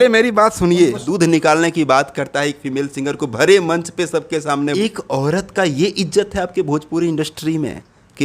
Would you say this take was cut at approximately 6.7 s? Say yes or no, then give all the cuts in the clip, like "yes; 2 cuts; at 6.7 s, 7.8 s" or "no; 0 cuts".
no; 2 cuts; at 1.0 s, 4.7 s